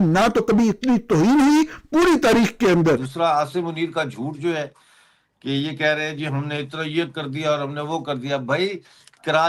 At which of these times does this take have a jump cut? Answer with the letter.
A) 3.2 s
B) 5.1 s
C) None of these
A